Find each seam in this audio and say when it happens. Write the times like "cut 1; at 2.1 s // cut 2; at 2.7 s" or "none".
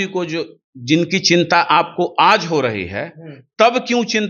none